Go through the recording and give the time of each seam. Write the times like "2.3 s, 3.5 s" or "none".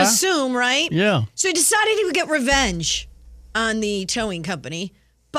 none